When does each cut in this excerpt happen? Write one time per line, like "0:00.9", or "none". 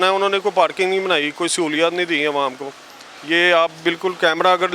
none